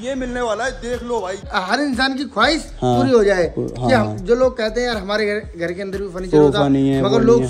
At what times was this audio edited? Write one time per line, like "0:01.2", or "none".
0:01.5